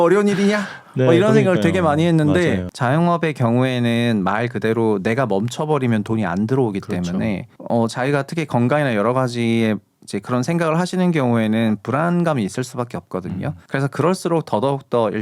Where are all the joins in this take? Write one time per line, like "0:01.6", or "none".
0:02.7

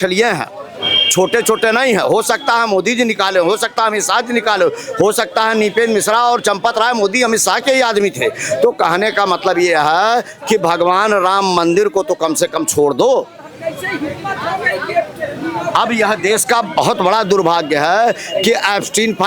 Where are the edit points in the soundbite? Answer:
none

